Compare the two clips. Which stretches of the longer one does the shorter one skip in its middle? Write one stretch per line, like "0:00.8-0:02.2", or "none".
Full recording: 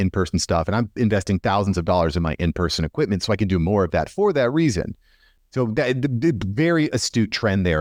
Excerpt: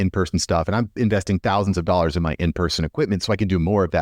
none